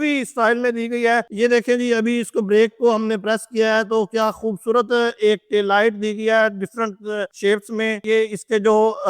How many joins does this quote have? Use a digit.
1